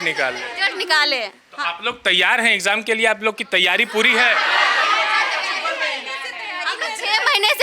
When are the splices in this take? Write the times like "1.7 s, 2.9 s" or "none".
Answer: none